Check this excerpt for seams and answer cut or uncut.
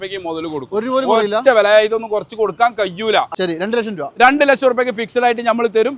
cut